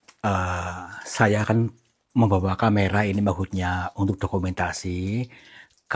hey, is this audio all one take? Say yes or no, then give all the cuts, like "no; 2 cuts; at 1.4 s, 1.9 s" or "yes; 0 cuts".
yes; 0 cuts